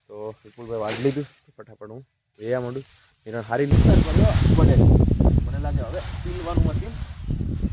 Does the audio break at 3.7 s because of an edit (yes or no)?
yes